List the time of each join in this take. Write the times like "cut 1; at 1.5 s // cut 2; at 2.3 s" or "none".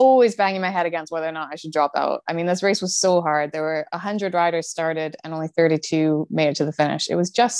none